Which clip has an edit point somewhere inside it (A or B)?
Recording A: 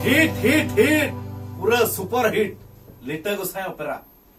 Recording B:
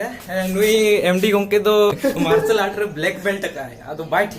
B